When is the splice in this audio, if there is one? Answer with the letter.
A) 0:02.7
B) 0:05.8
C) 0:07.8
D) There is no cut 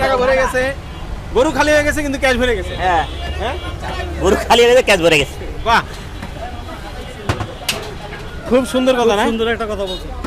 D